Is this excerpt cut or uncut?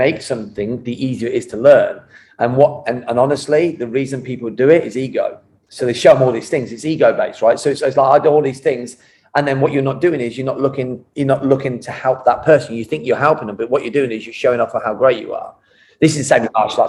uncut